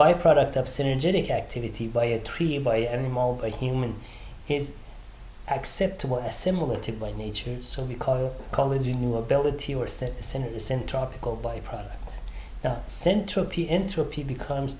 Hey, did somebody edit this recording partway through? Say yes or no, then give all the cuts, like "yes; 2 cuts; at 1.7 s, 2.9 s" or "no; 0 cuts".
yes; 1 cut; at 1.7 s